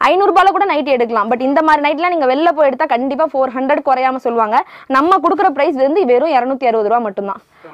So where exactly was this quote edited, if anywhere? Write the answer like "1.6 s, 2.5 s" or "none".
none